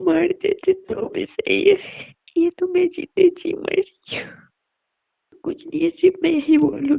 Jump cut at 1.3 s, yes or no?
no